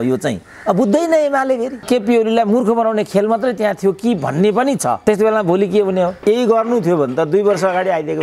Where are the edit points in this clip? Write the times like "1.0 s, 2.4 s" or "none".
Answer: 1.8 s, 6.2 s